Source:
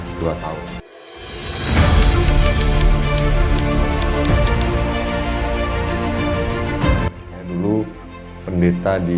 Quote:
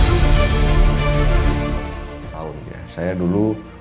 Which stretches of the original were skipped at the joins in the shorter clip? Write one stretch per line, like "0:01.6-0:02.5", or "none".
0:04.9-0:07.1

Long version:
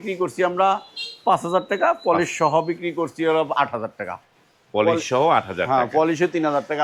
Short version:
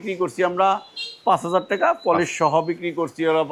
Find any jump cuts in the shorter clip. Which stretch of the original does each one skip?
none

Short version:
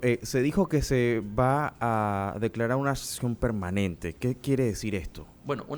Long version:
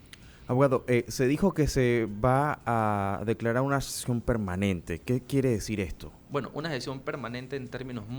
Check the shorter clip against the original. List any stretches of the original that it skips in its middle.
none

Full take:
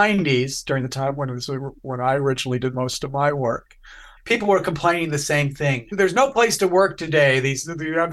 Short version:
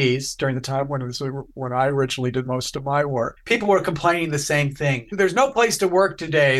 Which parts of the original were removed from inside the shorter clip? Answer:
0:03.6-0:04.2

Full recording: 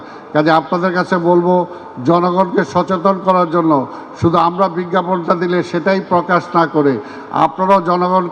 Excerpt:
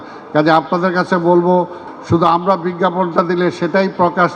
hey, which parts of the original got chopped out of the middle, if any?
0:01.9-0:04.0

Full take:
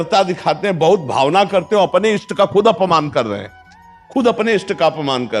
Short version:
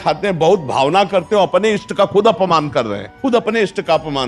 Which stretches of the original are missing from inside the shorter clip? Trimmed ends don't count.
0:03.4-0:04.0

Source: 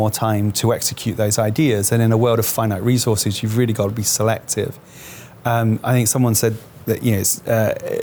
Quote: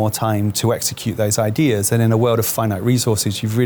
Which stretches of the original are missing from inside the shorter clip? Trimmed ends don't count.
none

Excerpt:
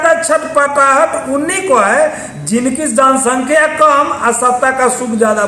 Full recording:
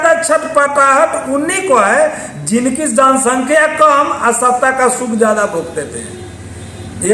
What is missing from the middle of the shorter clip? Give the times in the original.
none

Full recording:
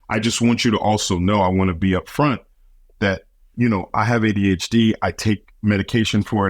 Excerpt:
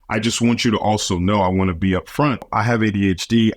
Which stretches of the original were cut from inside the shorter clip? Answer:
0:02.5-0:03.9

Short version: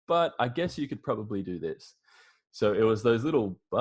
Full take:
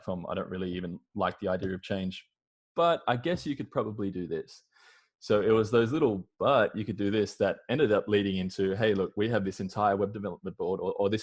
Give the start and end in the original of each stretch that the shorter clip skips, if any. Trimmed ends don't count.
none

